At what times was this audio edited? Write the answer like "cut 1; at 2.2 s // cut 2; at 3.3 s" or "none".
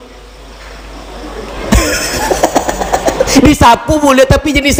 none